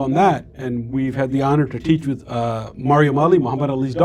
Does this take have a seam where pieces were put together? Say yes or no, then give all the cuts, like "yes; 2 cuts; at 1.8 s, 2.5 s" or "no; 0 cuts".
no; 0 cuts